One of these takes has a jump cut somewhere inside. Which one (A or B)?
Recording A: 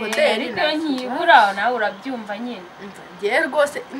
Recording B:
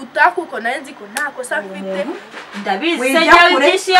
B